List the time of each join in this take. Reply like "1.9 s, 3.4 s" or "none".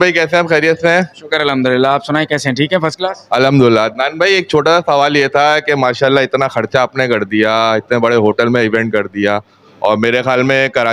none